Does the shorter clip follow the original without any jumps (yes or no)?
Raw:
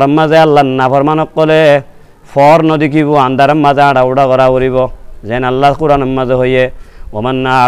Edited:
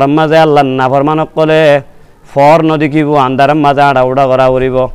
yes